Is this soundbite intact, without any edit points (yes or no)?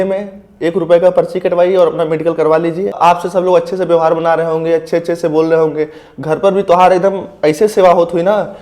no